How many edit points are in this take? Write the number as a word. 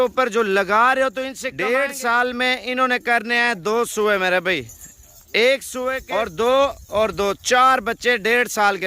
two